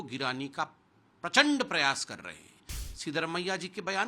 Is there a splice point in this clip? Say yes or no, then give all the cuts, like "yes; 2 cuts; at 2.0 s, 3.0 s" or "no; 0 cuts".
yes; 1 cut; at 2.7 s